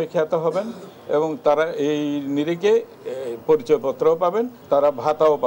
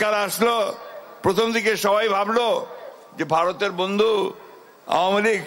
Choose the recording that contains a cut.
first; 1 cut; at 4.6 s

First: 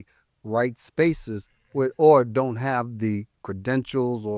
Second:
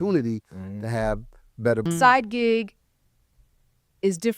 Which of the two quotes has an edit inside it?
second; 1 cut; at 1.9 s

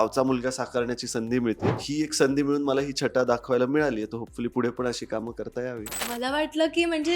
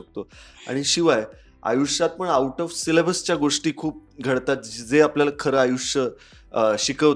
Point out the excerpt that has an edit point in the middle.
first; 2 cuts; at 1.8 s, 6.0 s

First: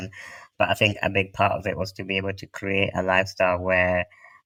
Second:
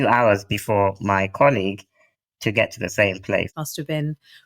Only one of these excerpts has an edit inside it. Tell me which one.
second; 1 cut; at 3.5 s

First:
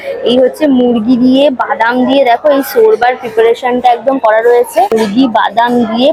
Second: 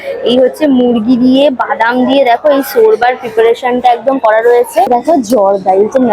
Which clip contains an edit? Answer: second; 1 cut; at 4.9 s

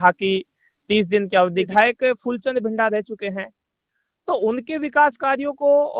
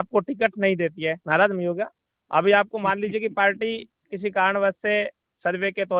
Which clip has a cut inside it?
first; 1 cut; at 1.6 s

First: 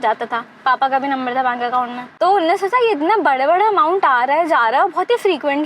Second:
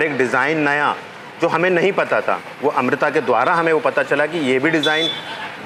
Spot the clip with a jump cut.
first; 1 cut; at 2.0 s

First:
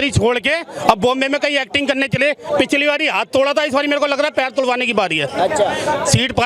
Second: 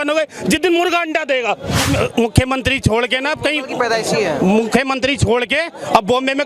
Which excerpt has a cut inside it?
second; 1 cut; at 1.9 s

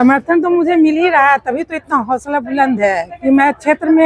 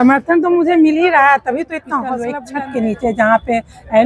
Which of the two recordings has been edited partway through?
second; 1 cut; at 2.4 s

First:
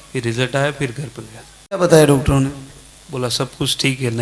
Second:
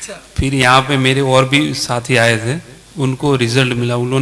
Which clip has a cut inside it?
first; 1 cut; at 1.8 s

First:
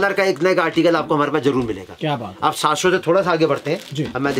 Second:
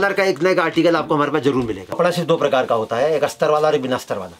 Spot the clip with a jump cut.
second; 1 cut; at 2.0 s

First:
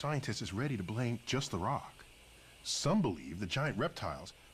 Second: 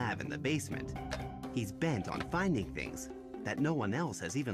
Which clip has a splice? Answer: first; 1 cut; at 1.2 s

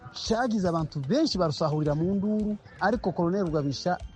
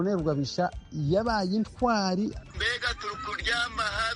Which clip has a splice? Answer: second; 1 cut; at 2.5 s

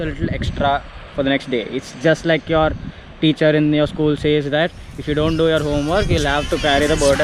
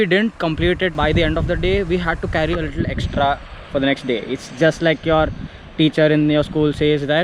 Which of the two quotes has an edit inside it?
second; 1 cut; at 0.9 s

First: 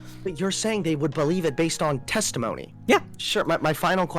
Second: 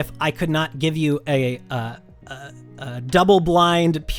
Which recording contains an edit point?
first; 1 cut; at 3.2 s

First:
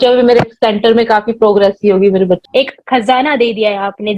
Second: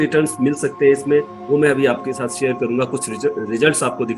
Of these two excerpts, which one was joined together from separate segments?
first; 1 cut; at 2.4 s

